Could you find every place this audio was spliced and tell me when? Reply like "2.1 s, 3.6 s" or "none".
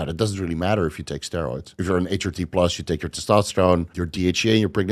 1.7 s, 4.0 s